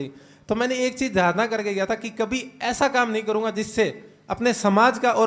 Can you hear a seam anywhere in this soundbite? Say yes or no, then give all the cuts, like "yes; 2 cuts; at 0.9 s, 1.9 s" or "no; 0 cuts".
no; 0 cuts